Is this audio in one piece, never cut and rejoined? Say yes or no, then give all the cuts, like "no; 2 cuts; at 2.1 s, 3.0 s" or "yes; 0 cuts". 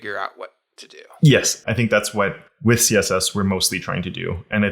no; 2 cuts; at 1.5 s, 2.5 s